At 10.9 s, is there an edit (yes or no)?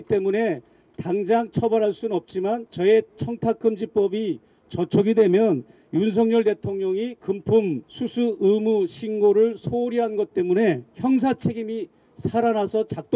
yes